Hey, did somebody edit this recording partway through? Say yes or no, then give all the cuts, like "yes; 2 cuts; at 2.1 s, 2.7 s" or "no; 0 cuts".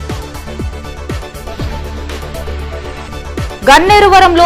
no; 0 cuts